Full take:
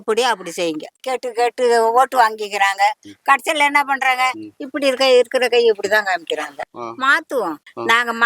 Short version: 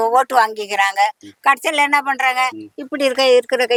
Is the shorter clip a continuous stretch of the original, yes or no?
yes